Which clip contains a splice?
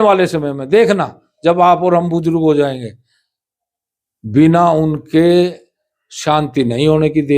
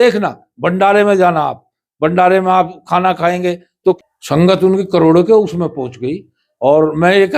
second; 1 cut; at 4.0 s

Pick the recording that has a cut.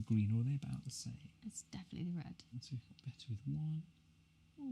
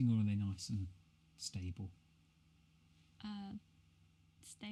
first; 1 cut; at 2.5 s

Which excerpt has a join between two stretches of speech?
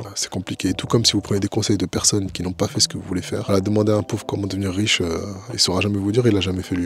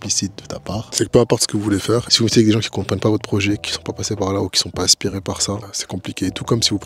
second; 2 cuts; at 0.9 s, 2.1 s

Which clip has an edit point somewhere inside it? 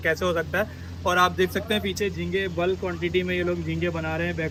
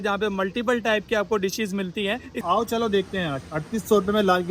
second; 1 cut; at 2.3 s

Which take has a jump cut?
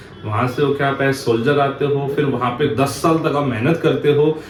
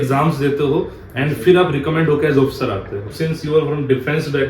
second; 1 cut; at 3.1 s

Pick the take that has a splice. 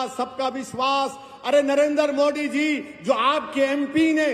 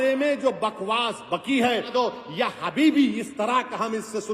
second; 1 cut; at 1.9 s

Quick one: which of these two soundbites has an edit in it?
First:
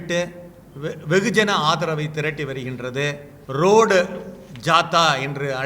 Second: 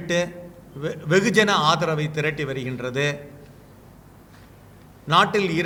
first; 1 cut; at 3.3 s

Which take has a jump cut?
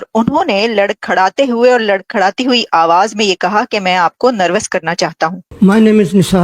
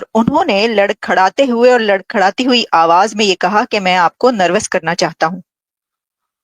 first; 1 cut; at 5.4 s

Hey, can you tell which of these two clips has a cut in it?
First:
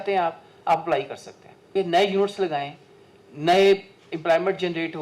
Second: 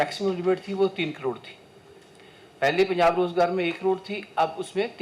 first; 1 cut; at 1.7 s

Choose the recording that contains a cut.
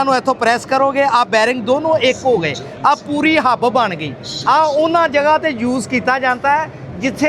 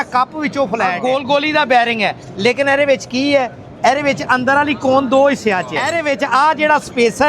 second; 2 cuts; at 1.0 s, 5.8 s

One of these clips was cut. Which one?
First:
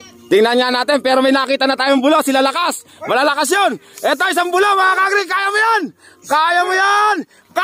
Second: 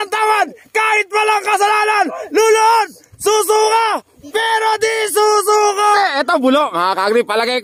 second; 1 cut; at 6.0 s

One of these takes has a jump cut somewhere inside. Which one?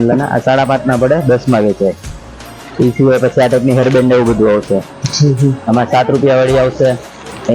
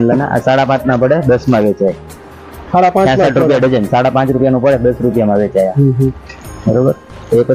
first; 1 cut; at 2.6 s

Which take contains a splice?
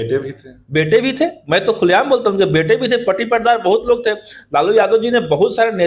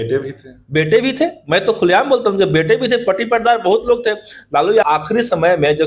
second; 1 cut; at 4.8 s

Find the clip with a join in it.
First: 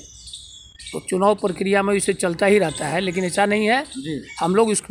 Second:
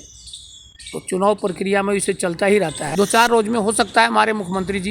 second; 1 cut; at 2.8 s

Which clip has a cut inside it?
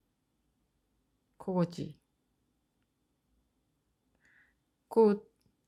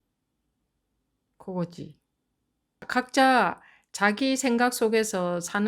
second; 1 cut; at 2.9 s

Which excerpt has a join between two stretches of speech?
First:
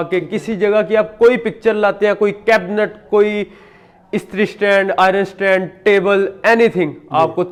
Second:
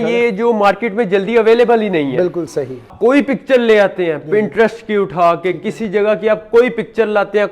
second; 1 cut; at 2.9 s

